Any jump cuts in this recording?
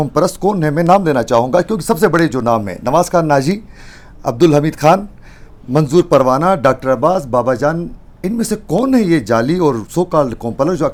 no; 0 cuts

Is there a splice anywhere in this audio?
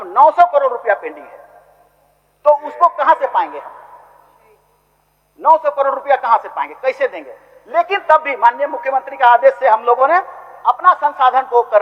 no; 0 cuts

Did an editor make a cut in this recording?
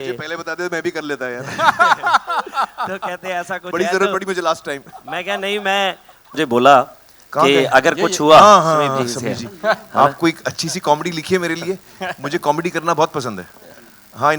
yes; 1 cut; at 6.3 s

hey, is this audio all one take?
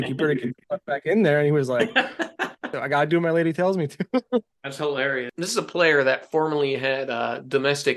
no; 2 cuts; at 2.8 s, 5.3 s

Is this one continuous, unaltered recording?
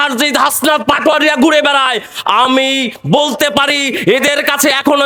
yes; 0 cuts

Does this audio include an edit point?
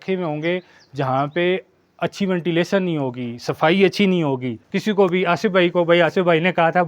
yes; 1 cut; at 4.6 s

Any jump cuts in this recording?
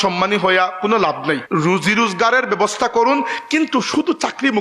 yes; 1 cut; at 1.4 s

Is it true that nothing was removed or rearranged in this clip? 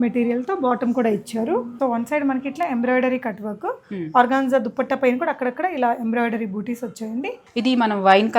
no; 2 cuts; at 1.7 s, 7.4 s

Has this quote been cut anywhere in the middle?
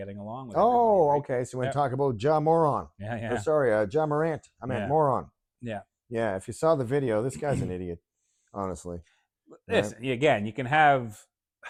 no; 0 cuts

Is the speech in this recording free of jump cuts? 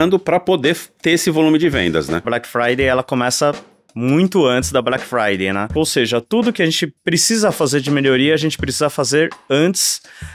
no; 2 cuts; at 2.2 s, 5.7 s

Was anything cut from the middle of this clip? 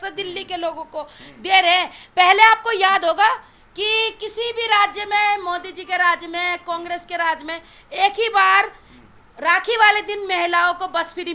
no; 0 cuts

